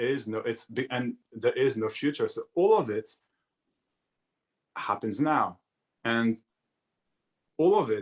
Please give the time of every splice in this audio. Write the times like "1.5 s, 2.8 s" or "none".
none